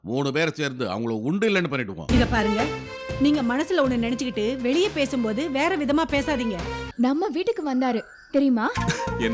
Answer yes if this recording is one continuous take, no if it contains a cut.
no